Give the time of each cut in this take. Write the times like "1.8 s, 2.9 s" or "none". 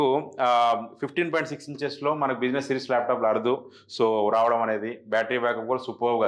none